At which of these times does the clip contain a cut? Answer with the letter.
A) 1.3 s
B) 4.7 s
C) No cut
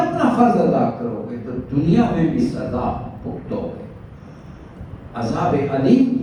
C